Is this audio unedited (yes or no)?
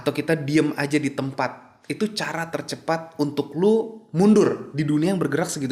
yes